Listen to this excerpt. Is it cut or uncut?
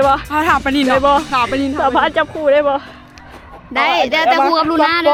uncut